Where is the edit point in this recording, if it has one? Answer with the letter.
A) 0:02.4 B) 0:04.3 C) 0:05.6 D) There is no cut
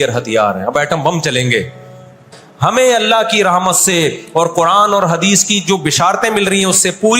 A